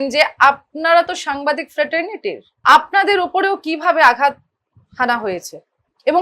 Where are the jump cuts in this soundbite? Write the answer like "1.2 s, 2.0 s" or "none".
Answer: 2.5 s

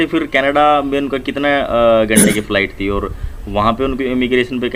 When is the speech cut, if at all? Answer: none

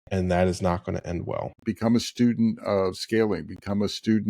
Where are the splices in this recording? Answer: 1.5 s

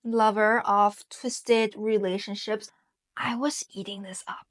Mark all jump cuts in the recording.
2.8 s

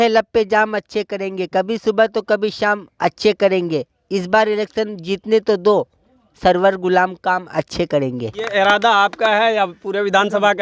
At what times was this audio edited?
8.5 s

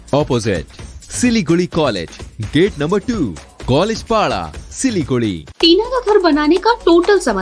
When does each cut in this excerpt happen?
5.5 s

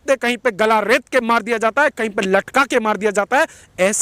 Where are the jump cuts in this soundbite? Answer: none

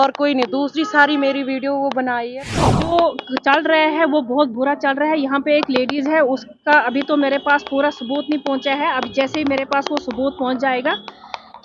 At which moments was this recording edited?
2.6 s

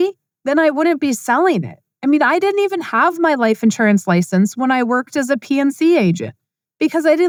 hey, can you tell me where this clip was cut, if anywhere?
none

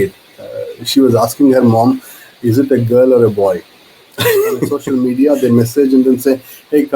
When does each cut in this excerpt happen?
4.8 s

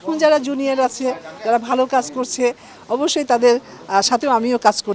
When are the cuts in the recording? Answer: none

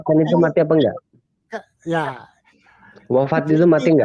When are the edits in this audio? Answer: none

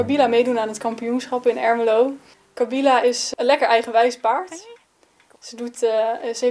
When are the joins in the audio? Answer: none

